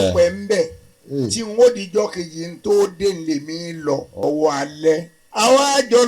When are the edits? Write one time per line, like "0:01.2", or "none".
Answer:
0:04.1
0:05.2